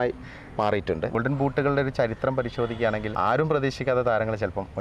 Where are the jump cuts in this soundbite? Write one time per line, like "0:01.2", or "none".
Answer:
0:01.1
0:03.1

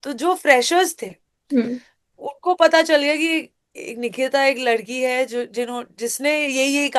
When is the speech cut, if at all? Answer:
none

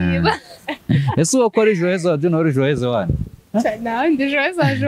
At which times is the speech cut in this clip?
0:03.3

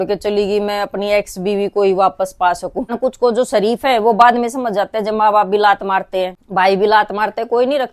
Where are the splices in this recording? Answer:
0:02.9
0:06.4

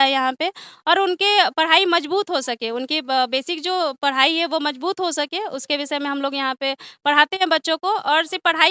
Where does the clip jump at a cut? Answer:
none

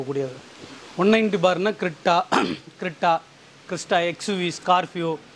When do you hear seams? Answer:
none

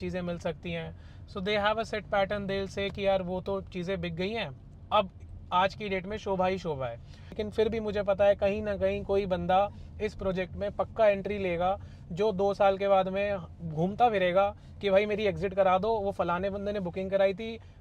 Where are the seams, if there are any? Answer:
0:07.4

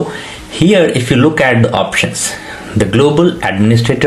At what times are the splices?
none

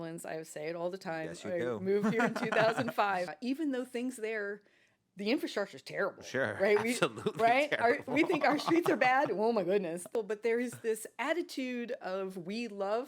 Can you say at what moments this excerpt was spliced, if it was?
0:03.4
0:10.1

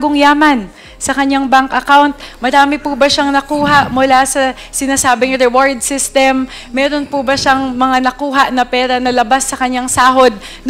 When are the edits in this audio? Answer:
none

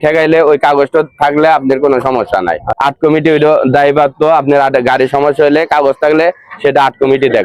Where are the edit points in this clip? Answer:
0:02.7

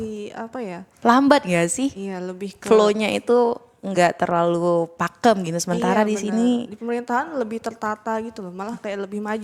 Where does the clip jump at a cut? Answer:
none

